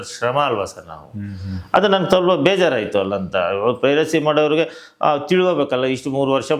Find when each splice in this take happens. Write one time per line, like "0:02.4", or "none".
none